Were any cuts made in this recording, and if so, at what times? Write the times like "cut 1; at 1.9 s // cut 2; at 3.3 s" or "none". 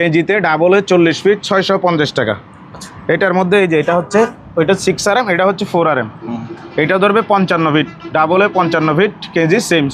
none